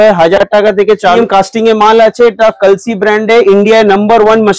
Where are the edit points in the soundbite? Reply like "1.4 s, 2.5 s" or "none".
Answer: 1.2 s